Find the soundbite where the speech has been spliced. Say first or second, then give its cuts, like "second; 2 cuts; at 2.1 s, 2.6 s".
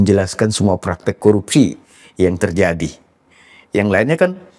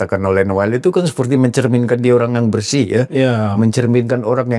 first; 1 cut; at 1.2 s